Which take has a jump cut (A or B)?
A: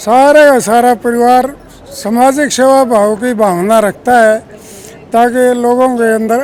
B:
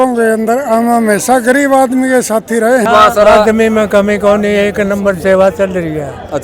B